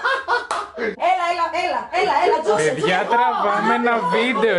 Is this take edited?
yes; 1 cut; at 0.9 s

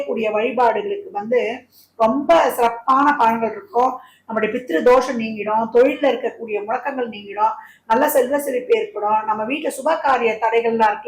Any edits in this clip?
no; 0 cuts

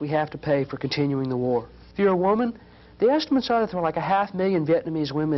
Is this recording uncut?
no; 1 cut; at 1.8 s

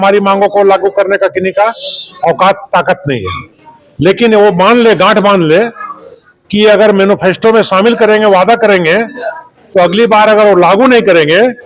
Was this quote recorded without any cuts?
yes; 0 cuts

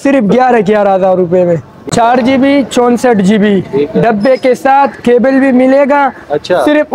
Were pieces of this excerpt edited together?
yes; 1 cut; at 1.7 s

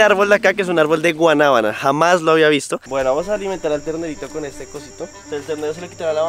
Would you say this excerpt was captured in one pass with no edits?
no; 2 cuts; at 2.8 s, 5.2 s

